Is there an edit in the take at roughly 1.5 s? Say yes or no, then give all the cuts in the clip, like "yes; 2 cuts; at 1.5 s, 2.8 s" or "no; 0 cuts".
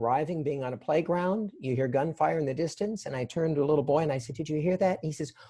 no; 0 cuts